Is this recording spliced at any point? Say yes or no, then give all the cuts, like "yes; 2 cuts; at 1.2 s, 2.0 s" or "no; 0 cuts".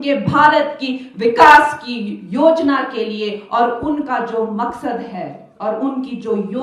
no; 0 cuts